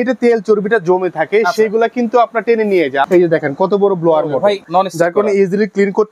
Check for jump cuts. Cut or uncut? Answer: cut